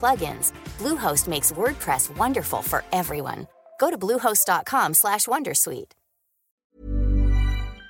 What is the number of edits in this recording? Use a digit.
1